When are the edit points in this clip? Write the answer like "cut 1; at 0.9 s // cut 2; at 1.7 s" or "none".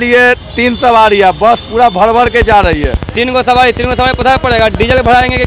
none